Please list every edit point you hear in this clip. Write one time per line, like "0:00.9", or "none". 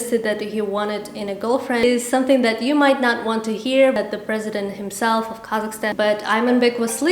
0:01.8
0:04.0
0:05.9